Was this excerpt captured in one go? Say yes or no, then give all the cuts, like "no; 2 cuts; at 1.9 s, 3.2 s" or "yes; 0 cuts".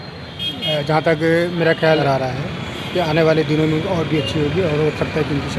no; 1 cut; at 2.0 s